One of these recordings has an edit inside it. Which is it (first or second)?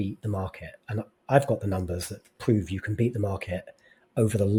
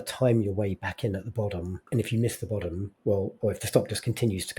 second